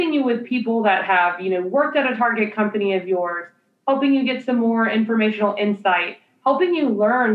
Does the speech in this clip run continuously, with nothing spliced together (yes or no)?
yes